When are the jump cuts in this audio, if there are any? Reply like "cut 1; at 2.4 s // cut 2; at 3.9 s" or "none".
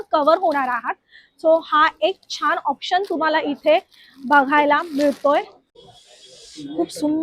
cut 1; at 5.8 s